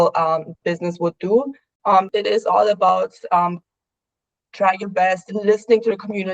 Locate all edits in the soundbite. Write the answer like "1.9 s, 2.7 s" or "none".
1.9 s